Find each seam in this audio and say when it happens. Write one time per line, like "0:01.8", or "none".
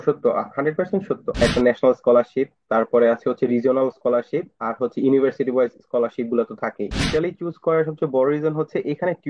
0:01.3
0:06.9